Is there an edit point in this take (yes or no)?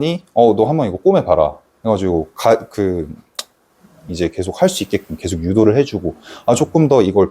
no